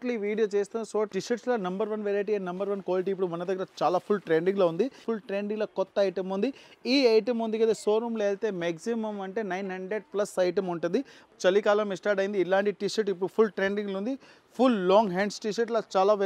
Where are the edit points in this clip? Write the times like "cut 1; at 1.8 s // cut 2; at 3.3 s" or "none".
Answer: cut 1; at 1.1 s // cut 2; at 5.0 s // cut 3; at 11.3 s